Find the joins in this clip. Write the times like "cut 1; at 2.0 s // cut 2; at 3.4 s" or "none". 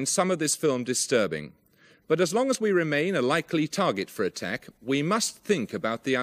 cut 1; at 3.5 s

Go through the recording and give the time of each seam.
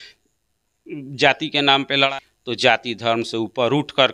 cut 1; at 2.1 s

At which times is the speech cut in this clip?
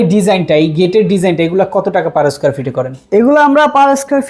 none

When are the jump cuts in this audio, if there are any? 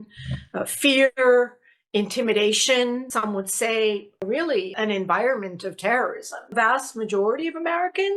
cut 1; at 4.7 s // cut 2; at 6.5 s

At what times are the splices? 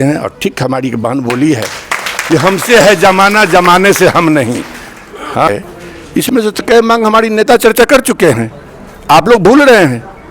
cut 1; at 5.5 s

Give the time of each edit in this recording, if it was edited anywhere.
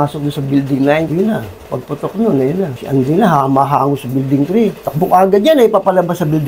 none

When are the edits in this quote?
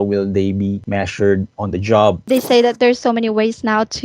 cut 1; at 0.8 s // cut 2; at 2.2 s

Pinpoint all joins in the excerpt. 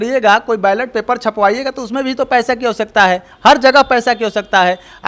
none

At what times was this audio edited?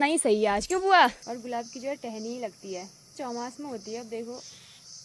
cut 1; at 1.2 s // cut 2; at 3.1 s

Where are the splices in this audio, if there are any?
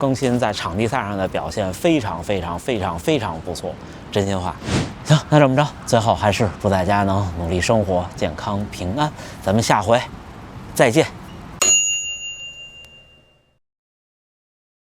none

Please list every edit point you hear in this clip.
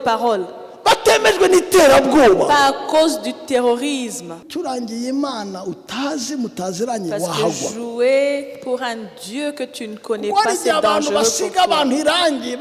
cut 1; at 4.4 s

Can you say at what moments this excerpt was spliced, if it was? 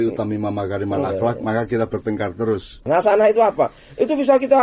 cut 1; at 2.8 s

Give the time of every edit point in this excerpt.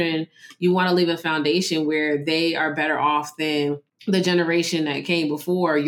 cut 1; at 3.9 s

